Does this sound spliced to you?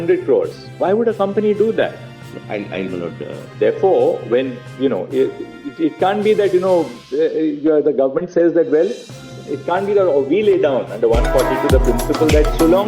no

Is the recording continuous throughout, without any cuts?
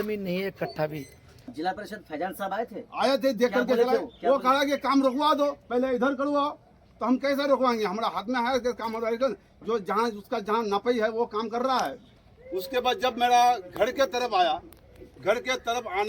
no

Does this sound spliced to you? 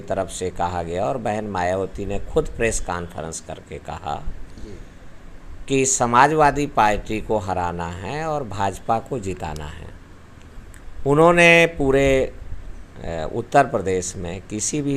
no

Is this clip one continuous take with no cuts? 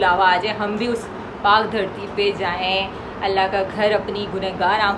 yes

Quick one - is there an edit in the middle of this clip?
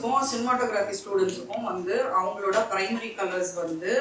no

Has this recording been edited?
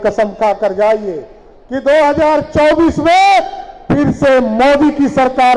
no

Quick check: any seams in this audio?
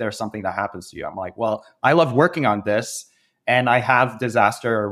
no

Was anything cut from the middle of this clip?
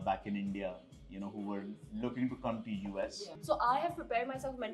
yes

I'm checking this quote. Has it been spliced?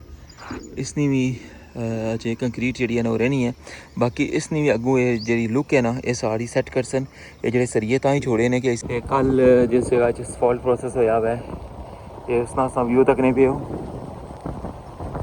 yes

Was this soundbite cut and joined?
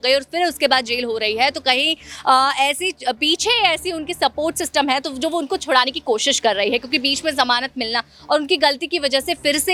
no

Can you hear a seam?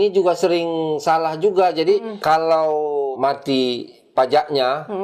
yes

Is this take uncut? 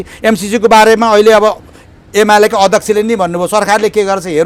yes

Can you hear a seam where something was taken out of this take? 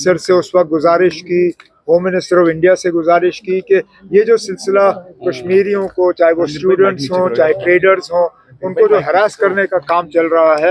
no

